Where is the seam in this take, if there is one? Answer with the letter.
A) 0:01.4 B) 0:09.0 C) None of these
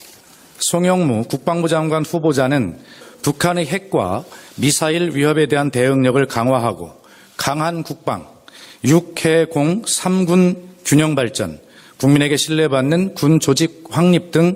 B